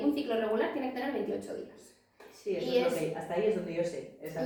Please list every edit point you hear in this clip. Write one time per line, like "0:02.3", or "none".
none